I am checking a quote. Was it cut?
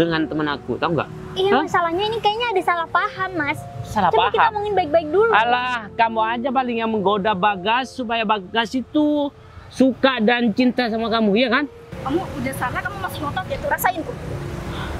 yes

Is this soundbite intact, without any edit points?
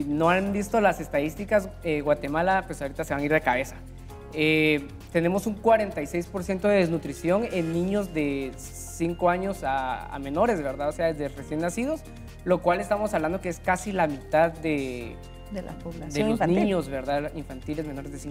yes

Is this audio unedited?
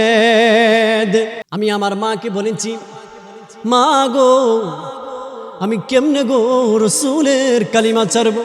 no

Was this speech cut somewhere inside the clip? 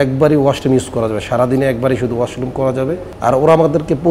yes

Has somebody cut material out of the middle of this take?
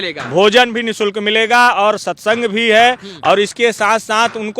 no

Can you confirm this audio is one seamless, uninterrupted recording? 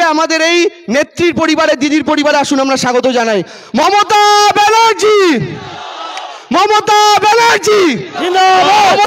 yes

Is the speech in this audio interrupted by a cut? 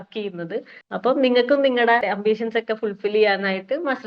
yes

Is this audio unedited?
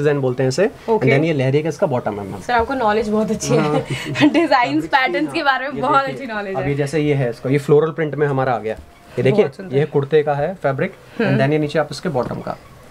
yes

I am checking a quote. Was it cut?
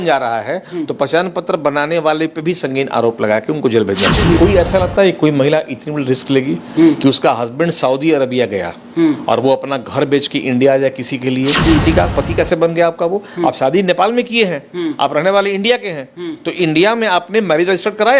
yes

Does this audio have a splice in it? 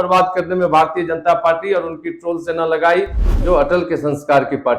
yes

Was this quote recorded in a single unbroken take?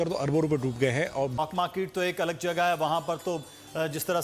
no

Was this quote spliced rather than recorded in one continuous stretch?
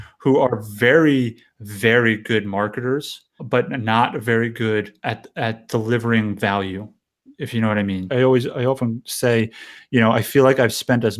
yes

